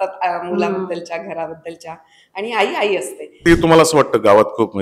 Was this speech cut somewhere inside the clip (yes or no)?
yes